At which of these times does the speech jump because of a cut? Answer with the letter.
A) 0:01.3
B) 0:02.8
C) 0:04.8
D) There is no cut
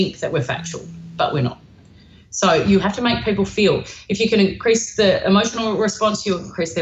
B